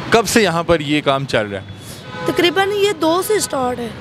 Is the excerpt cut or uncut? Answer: uncut